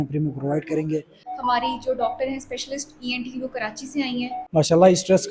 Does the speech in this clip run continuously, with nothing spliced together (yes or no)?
no